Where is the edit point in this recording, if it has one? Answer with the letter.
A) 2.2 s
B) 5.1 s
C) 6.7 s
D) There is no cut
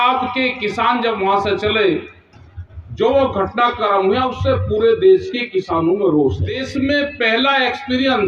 C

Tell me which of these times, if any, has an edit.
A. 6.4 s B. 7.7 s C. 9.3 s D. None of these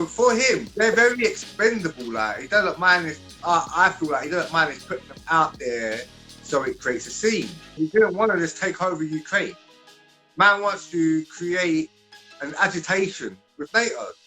B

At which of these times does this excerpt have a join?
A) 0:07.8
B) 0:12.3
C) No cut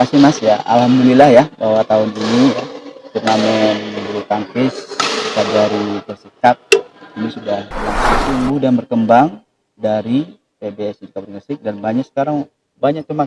A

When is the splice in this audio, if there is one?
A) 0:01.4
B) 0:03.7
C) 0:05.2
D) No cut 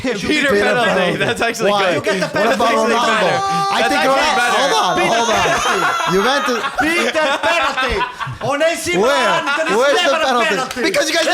D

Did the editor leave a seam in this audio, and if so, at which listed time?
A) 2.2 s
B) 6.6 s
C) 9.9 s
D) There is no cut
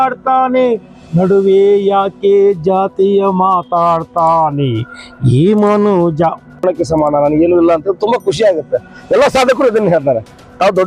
B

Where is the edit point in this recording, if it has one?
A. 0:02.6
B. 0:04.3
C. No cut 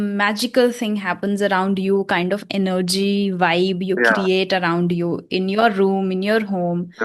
C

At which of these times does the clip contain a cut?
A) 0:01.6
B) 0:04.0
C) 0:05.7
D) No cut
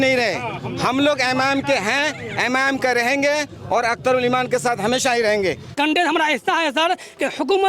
C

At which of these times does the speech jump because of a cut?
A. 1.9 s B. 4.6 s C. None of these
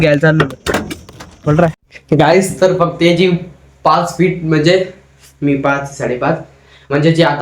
A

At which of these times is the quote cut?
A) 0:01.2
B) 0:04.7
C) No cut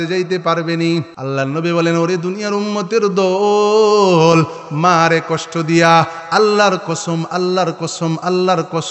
A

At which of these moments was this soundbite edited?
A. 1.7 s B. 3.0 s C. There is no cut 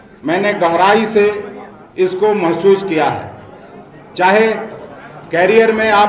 C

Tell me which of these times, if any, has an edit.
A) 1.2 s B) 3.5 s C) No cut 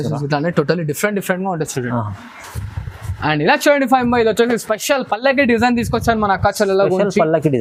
C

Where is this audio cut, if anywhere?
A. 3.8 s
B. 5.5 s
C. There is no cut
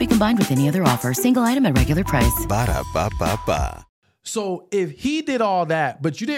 A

